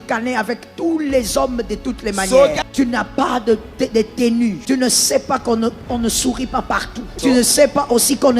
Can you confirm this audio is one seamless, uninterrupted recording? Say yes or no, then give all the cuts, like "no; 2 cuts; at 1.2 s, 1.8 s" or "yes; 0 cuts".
no; 3 cuts; at 2.6 s, 4.6 s, 7.2 s